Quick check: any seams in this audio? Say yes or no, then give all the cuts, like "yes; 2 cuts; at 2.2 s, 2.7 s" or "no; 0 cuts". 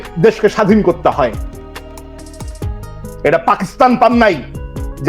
yes; 2 cuts; at 1.3 s, 2.8 s